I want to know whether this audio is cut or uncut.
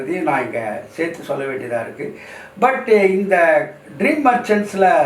uncut